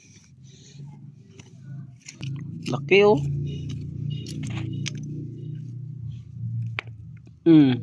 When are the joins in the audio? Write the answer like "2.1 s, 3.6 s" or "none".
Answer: 2.2 s

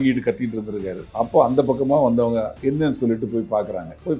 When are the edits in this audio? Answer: 1.0 s, 2.5 s

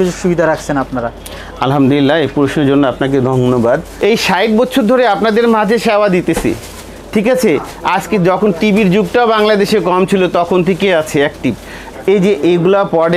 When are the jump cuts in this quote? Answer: 3.9 s, 11.8 s

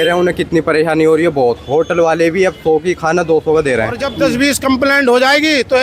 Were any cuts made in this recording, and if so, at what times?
4.1 s

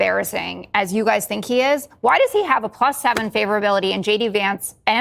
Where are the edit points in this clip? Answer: none

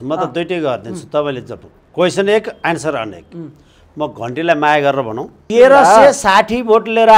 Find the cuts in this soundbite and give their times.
5.3 s

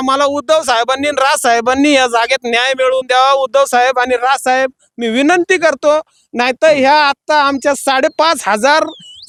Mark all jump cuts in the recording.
none

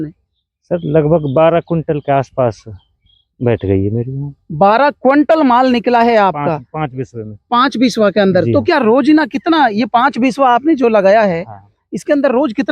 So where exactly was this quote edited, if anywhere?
none

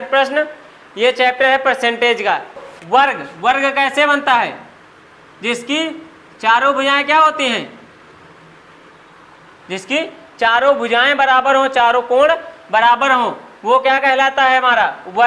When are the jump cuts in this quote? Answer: 2.7 s

